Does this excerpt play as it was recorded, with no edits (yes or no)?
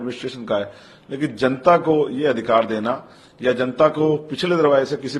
yes